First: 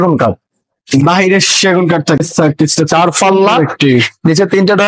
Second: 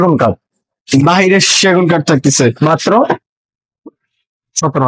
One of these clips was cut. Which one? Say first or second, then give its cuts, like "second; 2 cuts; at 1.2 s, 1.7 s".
first; 1 cut; at 2.2 s